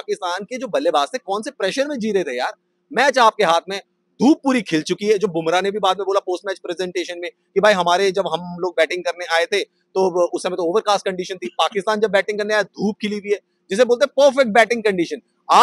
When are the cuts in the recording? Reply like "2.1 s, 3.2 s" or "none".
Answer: none